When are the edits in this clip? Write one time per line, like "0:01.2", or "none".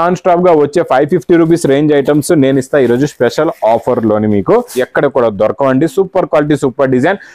0:04.8